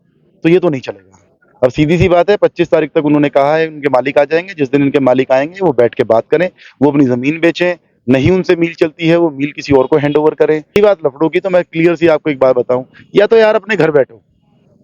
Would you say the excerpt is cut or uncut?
cut